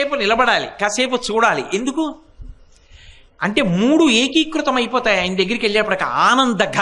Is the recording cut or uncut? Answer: uncut